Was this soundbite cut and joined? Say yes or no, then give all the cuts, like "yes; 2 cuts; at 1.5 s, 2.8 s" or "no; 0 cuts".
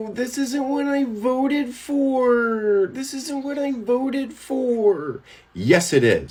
no; 0 cuts